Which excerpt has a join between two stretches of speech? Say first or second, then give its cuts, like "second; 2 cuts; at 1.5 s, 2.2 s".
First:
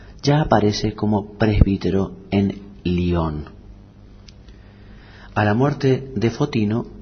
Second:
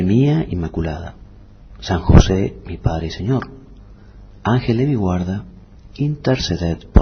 second; 1 cut; at 4.9 s